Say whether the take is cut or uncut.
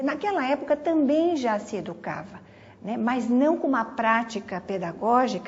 uncut